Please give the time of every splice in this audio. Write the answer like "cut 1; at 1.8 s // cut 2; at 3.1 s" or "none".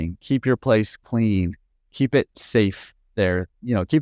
none